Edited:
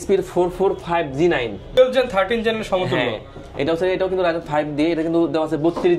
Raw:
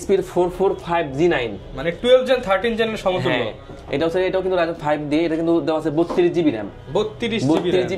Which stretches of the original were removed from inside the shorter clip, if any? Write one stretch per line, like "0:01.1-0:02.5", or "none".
0:01.8-0:02.1